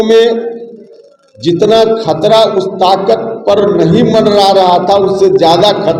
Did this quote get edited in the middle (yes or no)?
no